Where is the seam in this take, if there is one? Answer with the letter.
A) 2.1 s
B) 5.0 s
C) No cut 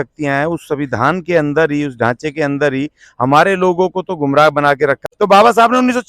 B